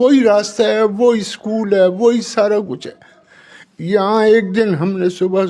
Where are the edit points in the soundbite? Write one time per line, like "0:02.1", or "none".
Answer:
none

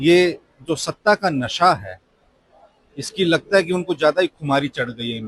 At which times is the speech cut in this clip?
none

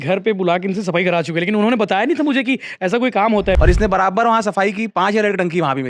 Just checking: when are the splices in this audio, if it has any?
0:03.6

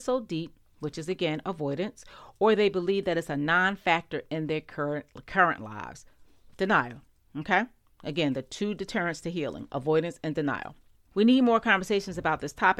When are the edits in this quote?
0:11.0

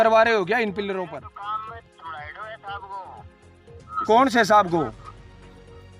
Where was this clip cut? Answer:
0:01.1

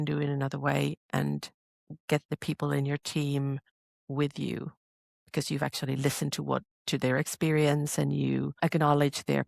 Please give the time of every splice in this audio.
0:08.5

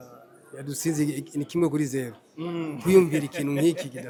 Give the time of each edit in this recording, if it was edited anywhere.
none

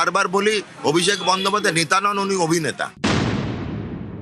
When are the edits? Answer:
0:02.9

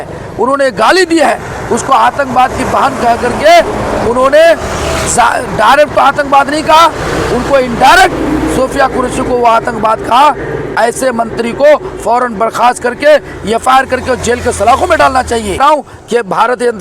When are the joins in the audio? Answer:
0:15.6

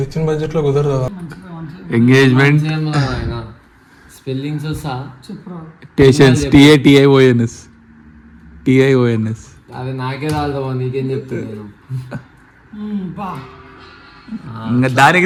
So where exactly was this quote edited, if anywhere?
none

